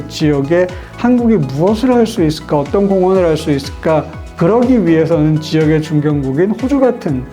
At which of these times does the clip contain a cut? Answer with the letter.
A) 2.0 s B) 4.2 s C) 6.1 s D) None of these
B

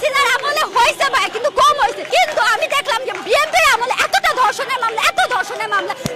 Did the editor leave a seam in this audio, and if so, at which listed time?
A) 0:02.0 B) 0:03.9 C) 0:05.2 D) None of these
A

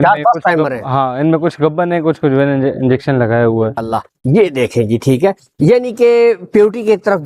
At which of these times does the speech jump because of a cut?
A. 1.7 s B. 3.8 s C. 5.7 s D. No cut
B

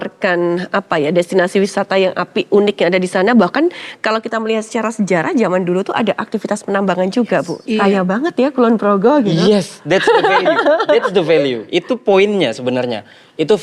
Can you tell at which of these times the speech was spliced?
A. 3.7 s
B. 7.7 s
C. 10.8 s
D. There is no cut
B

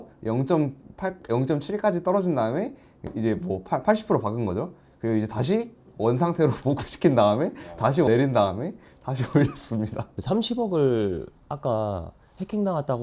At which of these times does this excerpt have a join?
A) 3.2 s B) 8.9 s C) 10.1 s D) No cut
C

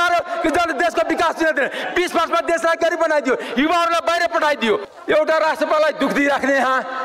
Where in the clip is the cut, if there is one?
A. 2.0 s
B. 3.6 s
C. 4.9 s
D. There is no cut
C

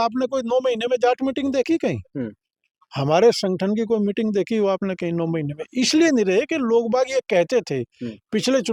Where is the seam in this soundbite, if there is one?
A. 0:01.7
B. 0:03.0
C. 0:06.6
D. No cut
D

